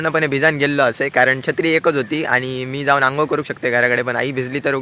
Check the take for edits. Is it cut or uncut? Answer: uncut